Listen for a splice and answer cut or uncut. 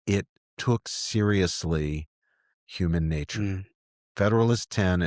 uncut